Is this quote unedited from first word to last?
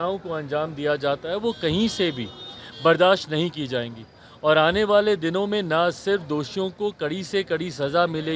yes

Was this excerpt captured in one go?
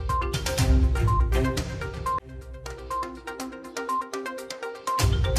no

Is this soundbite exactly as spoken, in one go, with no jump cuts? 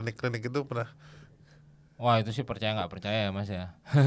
yes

